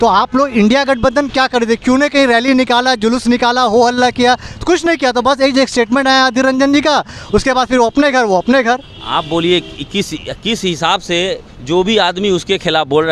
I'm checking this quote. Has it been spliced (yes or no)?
no